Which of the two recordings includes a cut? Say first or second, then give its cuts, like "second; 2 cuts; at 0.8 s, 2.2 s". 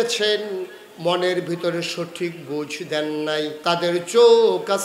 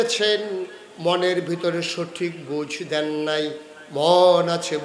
first; 1 cut; at 3.6 s